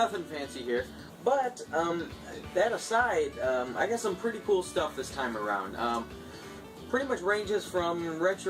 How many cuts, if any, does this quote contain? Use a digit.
1